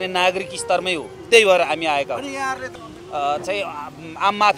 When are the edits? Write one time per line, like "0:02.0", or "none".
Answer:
0:02.8